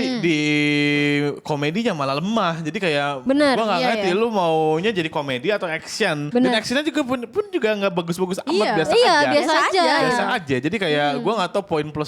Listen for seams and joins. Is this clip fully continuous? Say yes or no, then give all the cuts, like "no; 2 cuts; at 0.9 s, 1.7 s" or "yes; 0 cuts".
yes; 0 cuts